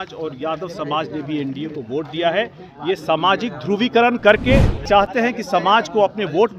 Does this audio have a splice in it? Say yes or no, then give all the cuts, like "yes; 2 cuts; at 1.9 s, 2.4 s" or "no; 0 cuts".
yes; 1 cut; at 4.8 s